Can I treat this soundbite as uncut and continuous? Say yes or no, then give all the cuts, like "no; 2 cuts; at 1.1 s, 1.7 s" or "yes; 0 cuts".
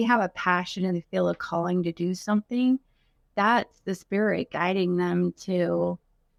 yes; 0 cuts